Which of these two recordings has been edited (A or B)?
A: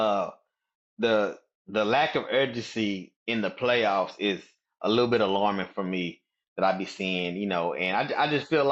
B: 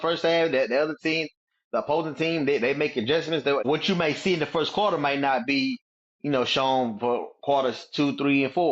B